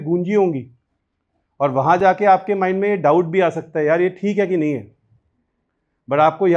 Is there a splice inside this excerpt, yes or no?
no